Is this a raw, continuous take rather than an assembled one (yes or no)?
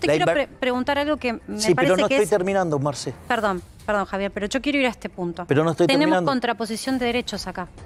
yes